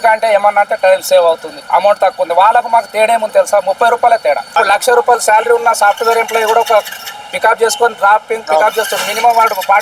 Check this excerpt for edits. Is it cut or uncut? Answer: cut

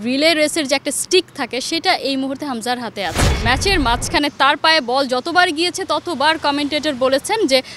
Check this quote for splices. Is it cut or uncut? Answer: cut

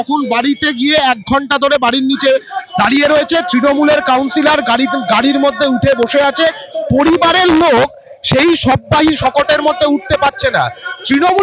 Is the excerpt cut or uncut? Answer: uncut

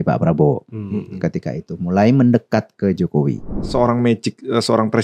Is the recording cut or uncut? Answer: cut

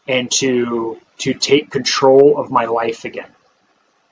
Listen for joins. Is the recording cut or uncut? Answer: cut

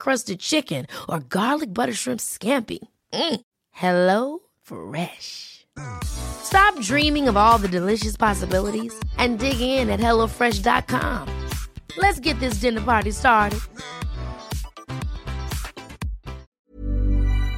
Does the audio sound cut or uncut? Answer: cut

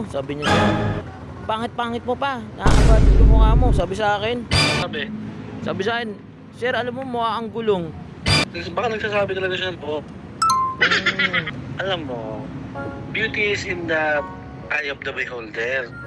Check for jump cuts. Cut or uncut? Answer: cut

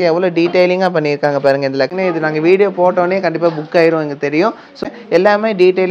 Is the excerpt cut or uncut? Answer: cut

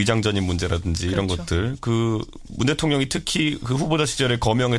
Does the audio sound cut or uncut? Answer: cut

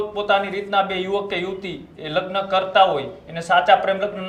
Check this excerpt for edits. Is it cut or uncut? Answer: uncut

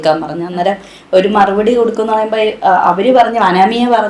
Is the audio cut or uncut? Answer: uncut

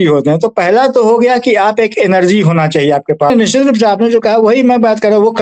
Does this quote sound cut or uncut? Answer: cut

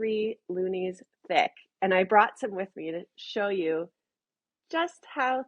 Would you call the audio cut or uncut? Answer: uncut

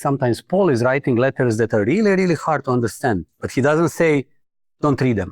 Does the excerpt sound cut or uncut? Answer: uncut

